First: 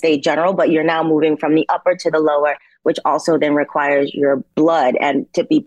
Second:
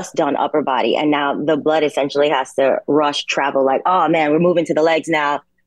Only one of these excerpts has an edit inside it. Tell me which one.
first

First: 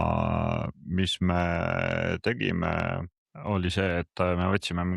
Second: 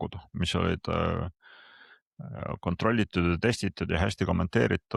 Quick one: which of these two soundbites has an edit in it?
first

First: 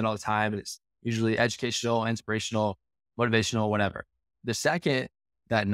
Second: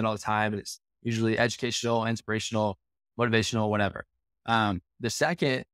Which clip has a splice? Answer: first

